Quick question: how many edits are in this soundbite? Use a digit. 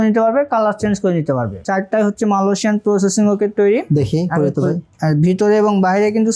1